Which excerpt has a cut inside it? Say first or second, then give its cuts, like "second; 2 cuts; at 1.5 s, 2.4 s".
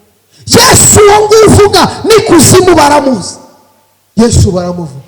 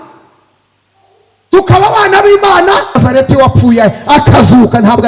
second; 1 cut; at 3.0 s